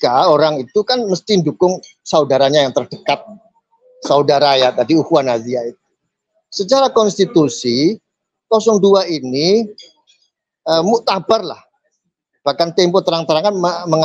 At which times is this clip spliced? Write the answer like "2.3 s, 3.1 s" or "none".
none